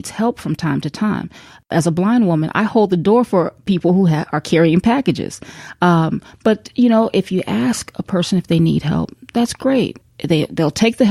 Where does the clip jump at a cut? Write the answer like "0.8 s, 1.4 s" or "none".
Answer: 1.7 s, 3.6 s, 10.1 s